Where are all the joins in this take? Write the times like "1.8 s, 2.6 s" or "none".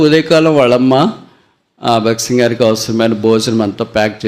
none